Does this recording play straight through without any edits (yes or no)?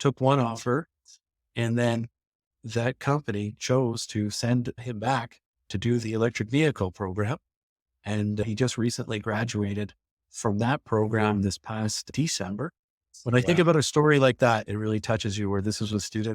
no